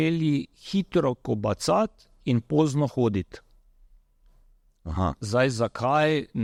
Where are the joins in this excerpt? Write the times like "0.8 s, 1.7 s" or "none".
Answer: none